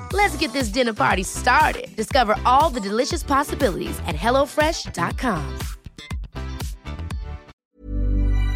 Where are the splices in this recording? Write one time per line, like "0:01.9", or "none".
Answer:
0:07.5